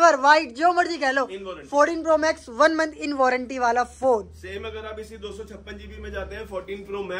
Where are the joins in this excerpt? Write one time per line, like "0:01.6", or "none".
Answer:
none